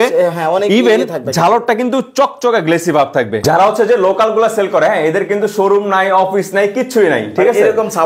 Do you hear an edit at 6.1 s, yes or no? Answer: no